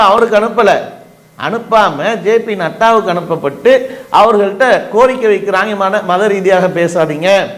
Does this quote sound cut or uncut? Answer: uncut